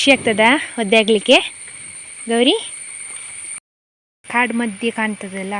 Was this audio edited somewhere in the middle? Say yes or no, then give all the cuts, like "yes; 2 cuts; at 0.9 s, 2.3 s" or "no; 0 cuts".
yes; 1 cut; at 3.5 s